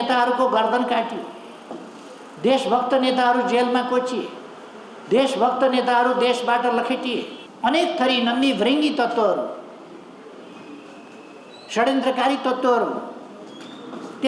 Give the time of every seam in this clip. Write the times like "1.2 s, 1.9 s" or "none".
7.4 s